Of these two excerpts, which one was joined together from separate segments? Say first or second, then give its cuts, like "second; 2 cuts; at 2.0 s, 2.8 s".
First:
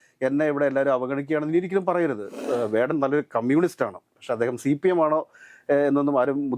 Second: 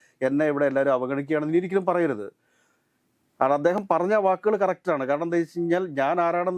first; 1 cut; at 2.4 s